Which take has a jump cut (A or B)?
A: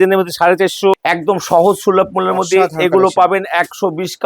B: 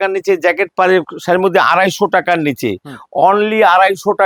A